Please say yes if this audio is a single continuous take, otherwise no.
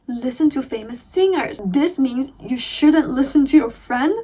no